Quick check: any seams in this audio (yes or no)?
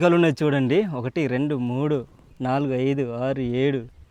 no